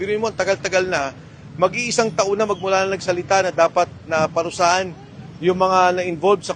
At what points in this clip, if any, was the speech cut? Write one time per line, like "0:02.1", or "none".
none